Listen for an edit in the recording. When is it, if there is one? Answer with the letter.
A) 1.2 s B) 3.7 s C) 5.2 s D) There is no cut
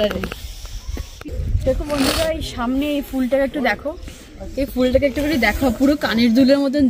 A